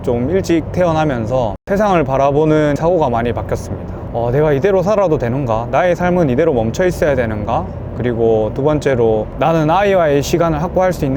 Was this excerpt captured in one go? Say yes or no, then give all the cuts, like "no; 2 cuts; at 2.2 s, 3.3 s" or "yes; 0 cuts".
yes; 0 cuts